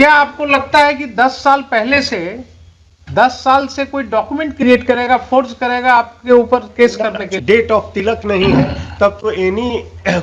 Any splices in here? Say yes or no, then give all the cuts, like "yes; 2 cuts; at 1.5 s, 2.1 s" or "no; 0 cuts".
yes; 1 cut; at 7.3 s